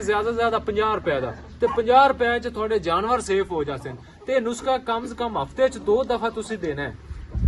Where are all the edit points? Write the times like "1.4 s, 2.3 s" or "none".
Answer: none

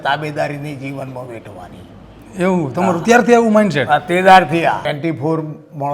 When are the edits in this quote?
4.8 s

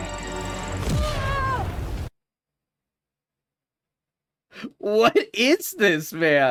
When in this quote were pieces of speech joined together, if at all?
none

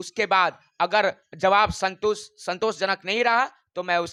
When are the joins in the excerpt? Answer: none

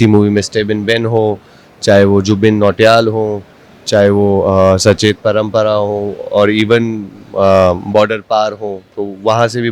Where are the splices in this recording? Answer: none

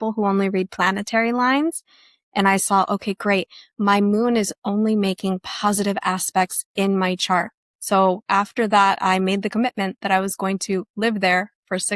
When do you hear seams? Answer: none

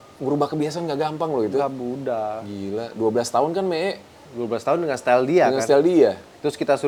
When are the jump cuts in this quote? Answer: none

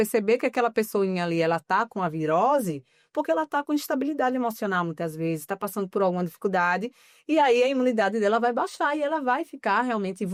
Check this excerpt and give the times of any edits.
none

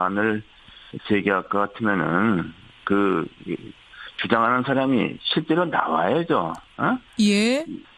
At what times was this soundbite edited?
3.8 s

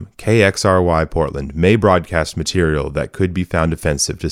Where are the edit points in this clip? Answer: none

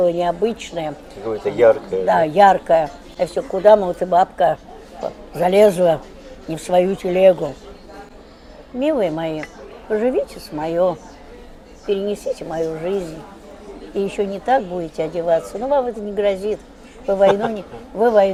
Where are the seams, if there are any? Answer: none

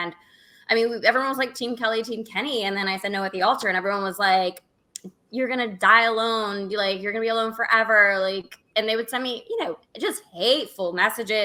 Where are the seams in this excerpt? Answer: none

